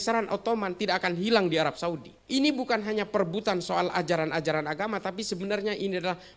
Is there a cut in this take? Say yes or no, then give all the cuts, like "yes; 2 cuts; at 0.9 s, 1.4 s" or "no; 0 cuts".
yes; 1 cut; at 2.1 s